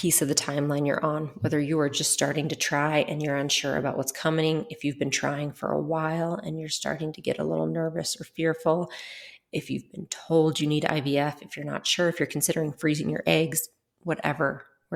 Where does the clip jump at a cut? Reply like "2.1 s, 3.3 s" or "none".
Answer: none